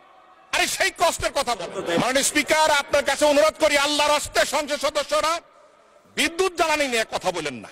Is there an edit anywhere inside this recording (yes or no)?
yes